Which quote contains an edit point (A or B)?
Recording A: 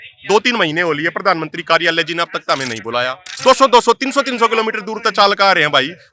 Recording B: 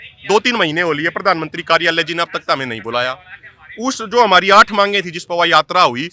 A